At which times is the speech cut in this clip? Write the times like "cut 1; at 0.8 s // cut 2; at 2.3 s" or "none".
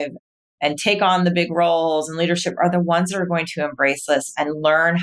none